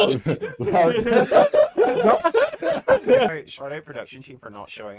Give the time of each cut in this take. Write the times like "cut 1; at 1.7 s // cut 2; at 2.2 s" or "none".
cut 1; at 3.4 s